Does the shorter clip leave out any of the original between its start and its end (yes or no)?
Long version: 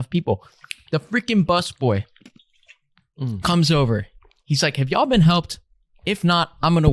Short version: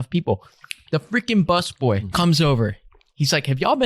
yes